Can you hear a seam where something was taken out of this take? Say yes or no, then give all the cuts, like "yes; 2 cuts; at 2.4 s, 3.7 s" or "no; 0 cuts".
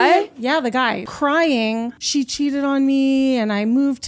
yes; 2 cuts; at 1.0 s, 2.0 s